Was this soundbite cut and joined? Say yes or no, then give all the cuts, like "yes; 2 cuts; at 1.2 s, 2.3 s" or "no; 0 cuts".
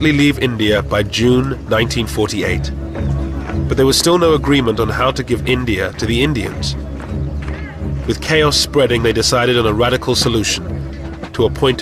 yes; 1 cut; at 7.0 s